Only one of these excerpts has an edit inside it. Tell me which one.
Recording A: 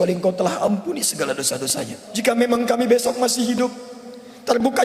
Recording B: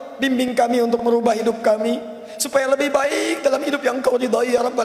A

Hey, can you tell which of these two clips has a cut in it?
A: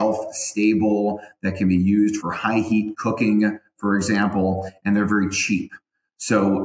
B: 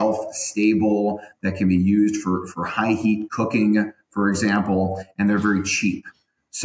A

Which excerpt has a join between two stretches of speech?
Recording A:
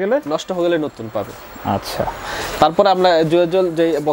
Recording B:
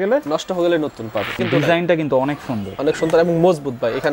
B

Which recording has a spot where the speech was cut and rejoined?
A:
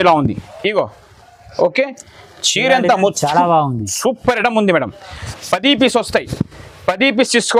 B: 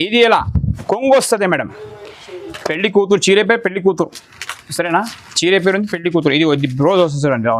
B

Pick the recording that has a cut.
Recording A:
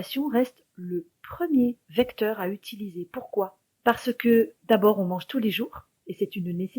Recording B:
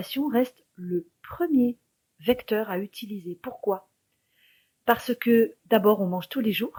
A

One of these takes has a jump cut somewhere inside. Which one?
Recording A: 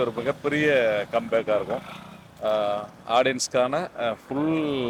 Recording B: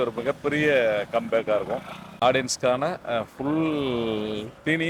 B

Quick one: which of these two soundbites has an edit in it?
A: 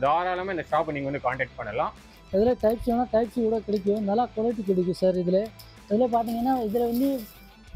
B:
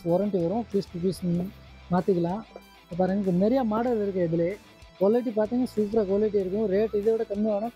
A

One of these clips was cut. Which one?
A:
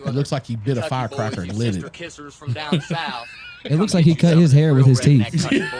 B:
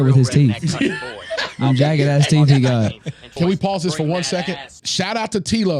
B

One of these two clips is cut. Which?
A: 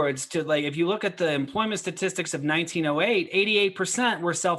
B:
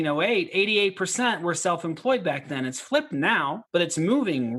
B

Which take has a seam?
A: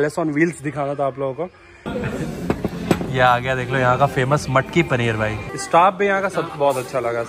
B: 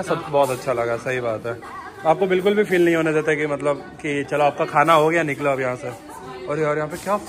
A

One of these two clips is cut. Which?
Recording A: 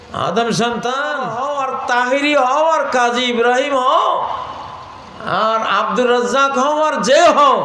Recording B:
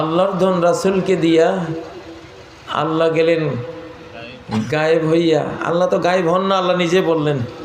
A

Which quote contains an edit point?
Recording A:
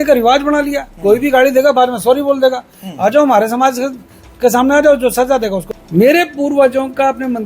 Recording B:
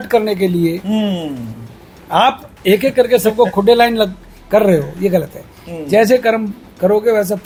A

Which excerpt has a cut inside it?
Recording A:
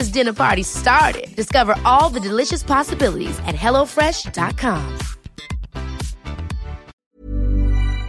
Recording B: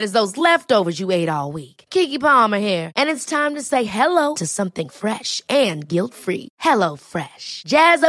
A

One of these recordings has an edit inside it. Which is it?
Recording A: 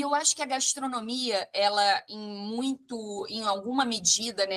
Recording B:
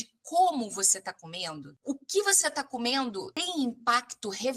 B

